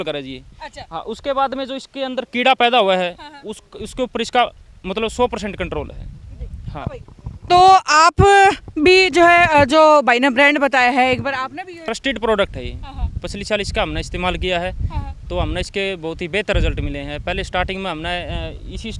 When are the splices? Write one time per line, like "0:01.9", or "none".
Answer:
0:11.9